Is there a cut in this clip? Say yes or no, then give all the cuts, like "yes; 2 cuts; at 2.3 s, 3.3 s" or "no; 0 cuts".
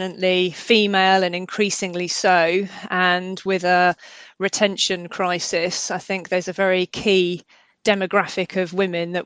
no; 0 cuts